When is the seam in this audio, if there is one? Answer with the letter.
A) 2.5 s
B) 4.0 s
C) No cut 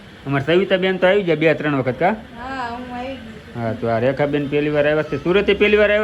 C